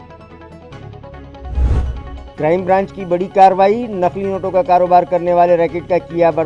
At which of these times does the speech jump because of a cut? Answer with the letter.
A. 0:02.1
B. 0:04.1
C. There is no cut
A